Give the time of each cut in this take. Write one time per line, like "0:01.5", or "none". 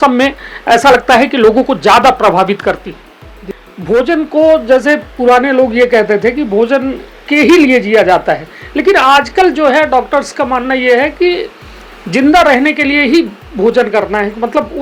0:03.4